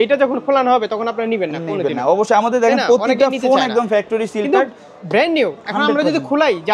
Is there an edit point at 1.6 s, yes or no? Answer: no